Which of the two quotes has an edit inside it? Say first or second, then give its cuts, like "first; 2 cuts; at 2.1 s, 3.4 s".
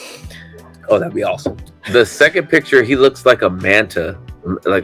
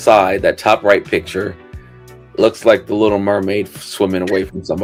first; 1 cut; at 1.7 s